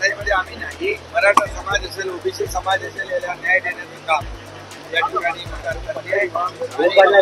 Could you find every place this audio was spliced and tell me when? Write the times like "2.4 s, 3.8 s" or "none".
1.0 s, 5.5 s